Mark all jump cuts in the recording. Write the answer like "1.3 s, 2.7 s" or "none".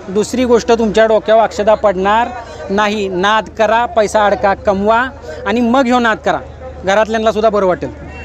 none